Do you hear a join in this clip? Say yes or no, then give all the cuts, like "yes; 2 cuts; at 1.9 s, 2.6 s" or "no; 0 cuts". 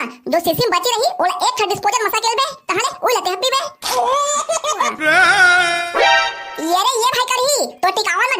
yes; 1 cut; at 4.9 s